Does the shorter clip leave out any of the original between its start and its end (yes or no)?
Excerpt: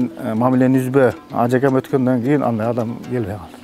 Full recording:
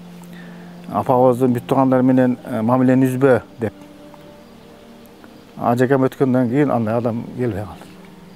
yes